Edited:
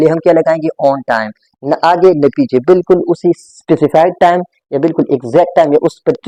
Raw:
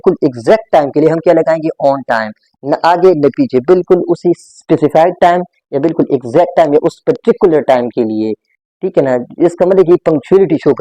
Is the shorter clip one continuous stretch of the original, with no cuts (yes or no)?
yes